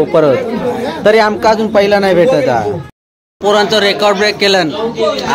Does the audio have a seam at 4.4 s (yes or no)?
no